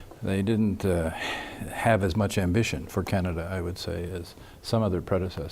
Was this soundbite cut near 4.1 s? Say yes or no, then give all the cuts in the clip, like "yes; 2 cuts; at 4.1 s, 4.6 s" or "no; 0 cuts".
yes; 1 cut; at 4.1 s